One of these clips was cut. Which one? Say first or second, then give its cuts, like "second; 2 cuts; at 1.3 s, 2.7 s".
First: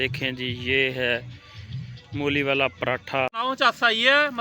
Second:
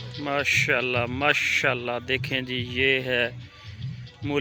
first; 1 cut; at 3.3 s